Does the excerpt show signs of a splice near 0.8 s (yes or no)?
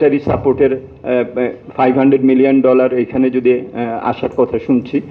no